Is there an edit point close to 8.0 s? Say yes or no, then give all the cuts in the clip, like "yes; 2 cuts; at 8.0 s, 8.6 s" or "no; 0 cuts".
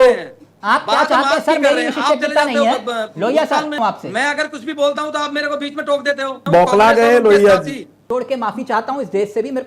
yes; 3 cuts; at 3.8 s, 6.4 s, 8.0 s